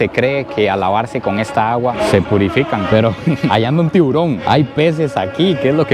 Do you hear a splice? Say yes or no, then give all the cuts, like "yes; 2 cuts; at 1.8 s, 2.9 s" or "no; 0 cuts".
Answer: no; 0 cuts